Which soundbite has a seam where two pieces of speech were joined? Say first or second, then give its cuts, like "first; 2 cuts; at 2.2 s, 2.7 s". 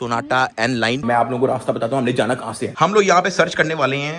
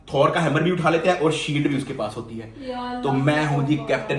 first; 1 cut; at 1.0 s